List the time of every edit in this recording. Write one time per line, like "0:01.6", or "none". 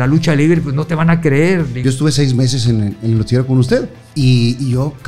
0:01.8
0:04.0